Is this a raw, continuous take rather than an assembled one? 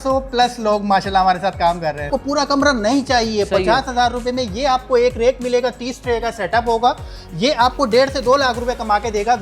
no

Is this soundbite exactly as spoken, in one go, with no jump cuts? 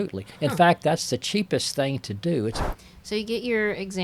no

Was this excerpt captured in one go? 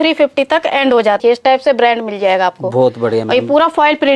no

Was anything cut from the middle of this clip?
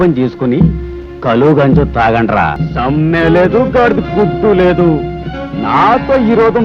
yes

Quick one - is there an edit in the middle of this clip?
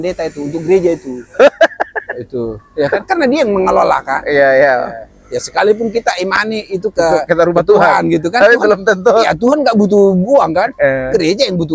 no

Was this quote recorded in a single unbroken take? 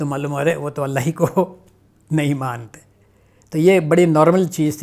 yes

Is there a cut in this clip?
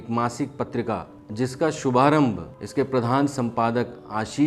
yes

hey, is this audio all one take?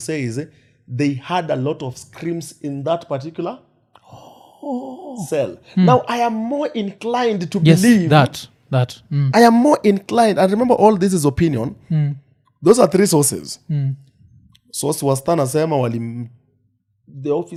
yes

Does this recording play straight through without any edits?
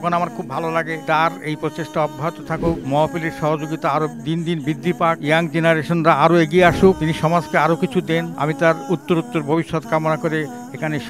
yes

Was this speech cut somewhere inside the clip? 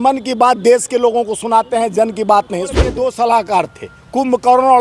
yes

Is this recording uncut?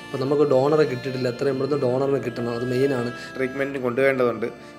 no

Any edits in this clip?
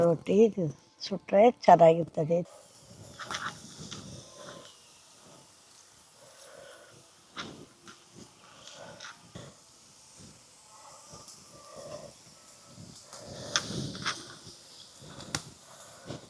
no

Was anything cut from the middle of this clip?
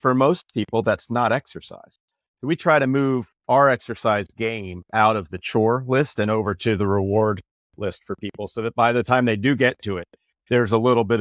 no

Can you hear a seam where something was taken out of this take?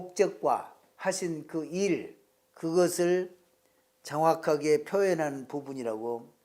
no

